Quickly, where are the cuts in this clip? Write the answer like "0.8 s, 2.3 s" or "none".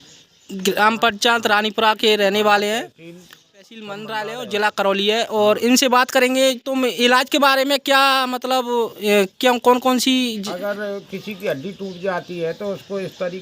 3.9 s